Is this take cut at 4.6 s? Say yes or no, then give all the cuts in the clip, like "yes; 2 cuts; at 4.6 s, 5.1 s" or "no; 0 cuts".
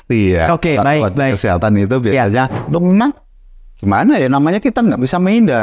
no; 1 cut; at 2.6 s